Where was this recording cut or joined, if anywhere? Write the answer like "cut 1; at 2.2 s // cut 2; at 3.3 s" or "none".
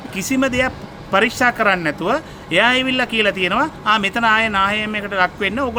none